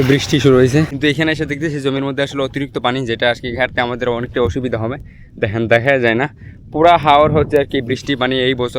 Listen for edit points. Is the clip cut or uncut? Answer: cut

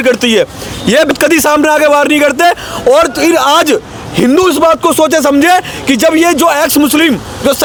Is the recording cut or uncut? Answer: uncut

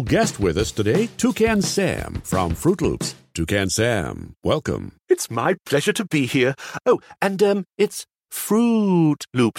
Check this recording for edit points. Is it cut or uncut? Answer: uncut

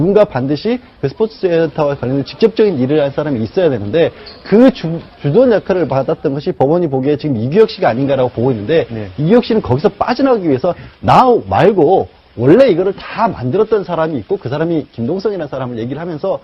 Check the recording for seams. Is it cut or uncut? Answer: cut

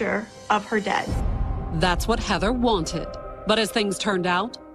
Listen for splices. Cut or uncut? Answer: uncut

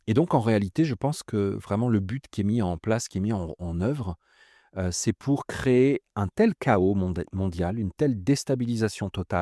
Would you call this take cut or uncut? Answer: uncut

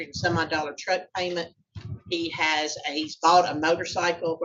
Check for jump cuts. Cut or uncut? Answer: uncut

